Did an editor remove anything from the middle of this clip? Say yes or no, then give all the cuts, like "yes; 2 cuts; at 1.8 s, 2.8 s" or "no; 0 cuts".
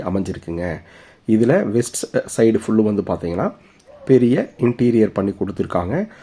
no; 0 cuts